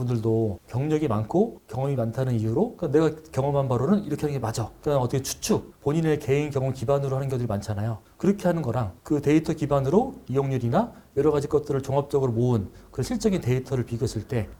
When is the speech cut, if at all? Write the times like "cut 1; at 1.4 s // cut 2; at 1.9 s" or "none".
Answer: none